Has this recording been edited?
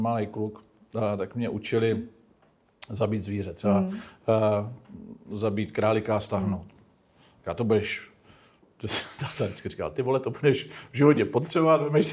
no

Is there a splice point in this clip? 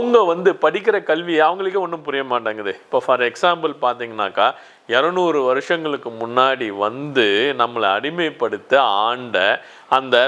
no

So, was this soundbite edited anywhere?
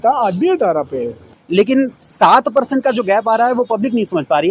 yes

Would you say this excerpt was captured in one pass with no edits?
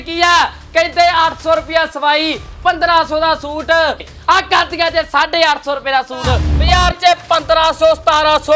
no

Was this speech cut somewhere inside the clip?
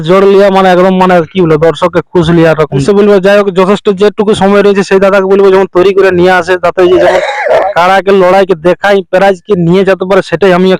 yes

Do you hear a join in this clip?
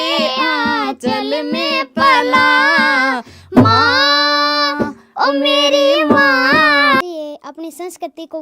yes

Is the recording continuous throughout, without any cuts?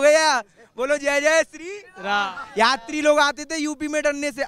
yes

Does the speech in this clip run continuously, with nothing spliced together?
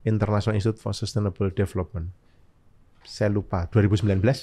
yes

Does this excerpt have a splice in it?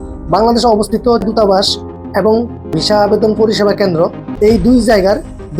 yes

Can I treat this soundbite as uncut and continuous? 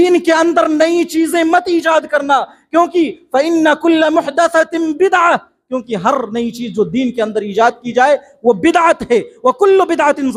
yes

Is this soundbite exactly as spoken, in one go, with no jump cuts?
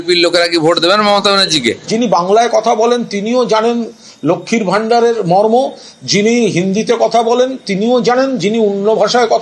no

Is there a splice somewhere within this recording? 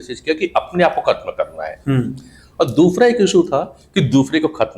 no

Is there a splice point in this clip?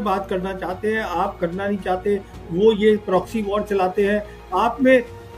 no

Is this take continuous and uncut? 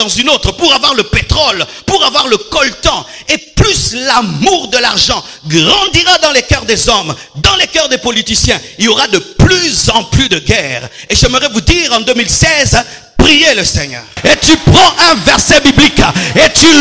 no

